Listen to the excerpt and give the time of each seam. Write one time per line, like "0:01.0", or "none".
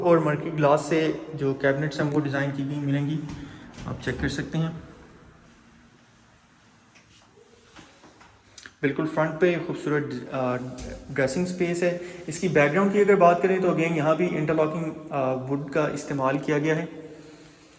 none

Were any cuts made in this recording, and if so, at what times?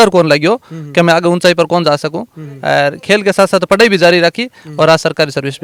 none

